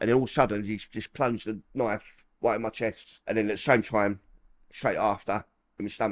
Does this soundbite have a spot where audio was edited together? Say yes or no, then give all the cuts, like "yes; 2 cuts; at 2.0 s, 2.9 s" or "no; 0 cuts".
yes; 1 cut; at 3.3 s